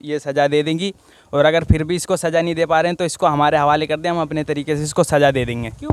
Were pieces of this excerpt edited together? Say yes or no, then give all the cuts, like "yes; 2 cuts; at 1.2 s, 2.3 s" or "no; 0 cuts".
no; 0 cuts